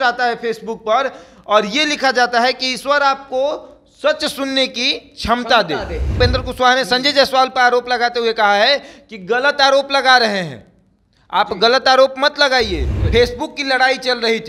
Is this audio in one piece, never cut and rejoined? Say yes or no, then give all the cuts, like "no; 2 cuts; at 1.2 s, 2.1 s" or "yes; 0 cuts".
no; 2 cuts; at 6.2 s, 12.9 s